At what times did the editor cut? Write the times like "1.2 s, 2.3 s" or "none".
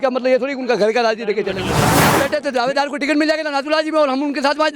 2.1 s